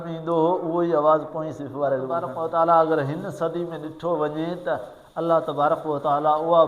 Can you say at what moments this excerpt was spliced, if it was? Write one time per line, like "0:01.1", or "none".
0:02.3